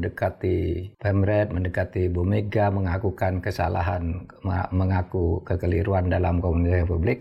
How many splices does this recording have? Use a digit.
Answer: 1